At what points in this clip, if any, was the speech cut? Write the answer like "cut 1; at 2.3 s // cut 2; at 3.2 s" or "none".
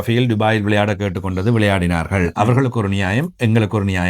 cut 1; at 2.3 s

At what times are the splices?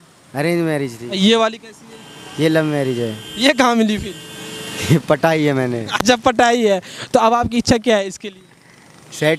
none

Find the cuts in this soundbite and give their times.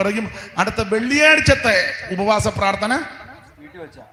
none

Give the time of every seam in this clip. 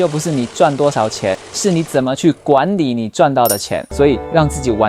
cut 1; at 1.5 s // cut 2; at 3.8 s

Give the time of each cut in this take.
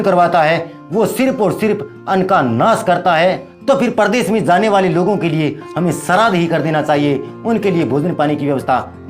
cut 1; at 3.5 s

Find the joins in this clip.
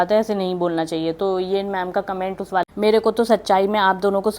cut 1; at 2.7 s

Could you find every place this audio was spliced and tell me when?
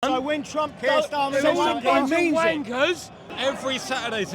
cut 1; at 3.3 s

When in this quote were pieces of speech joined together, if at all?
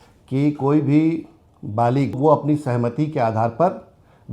cut 1; at 2.2 s

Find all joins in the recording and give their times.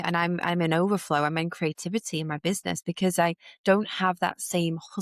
none

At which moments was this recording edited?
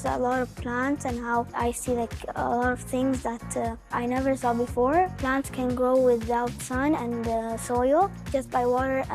cut 1; at 1.5 s // cut 2; at 3.9 s // cut 3; at 5.2 s // cut 4; at 8.2 s

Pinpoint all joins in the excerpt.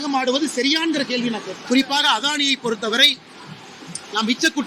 cut 1; at 1.5 s

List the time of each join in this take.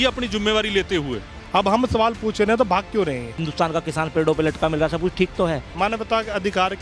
cut 1; at 1.3 s // cut 2; at 3.4 s // cut 3; at 5.7 s

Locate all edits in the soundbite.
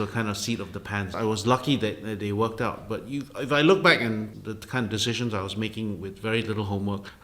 cut 1; at 1.1 s

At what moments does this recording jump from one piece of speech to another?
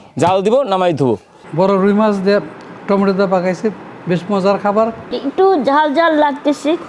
cut 1; at 1.4 s // cut 2; at 5.1 s

